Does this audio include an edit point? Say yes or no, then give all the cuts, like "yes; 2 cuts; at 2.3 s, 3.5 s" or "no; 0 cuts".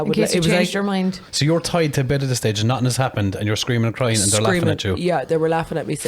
yes; 1 cut; at 1.2 s